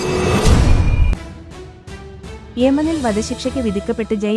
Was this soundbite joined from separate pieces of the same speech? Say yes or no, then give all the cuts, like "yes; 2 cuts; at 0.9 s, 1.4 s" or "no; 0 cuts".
yes; 1 cut; at 0.9 s